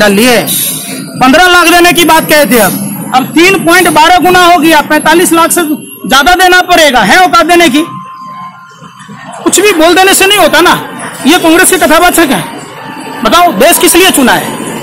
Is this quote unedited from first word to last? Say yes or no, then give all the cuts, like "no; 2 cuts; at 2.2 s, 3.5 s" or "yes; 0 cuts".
yes; 0 cuts